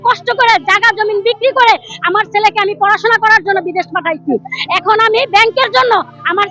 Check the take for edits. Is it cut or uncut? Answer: uncut